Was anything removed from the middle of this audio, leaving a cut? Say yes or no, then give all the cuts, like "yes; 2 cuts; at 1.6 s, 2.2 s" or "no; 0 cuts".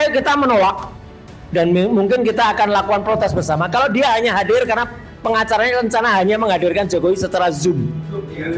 no; 0 cuts